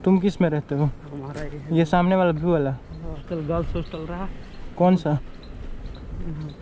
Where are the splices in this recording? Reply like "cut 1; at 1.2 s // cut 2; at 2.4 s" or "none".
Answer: cut 1; at 3.2 s